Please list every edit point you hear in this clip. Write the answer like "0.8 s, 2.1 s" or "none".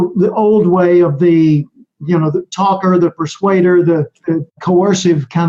4.5 s